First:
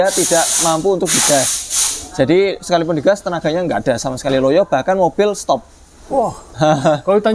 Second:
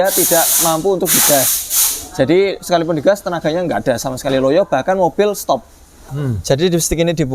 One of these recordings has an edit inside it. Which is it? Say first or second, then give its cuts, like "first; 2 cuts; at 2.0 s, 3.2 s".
second; 1 cut; at 5.9 s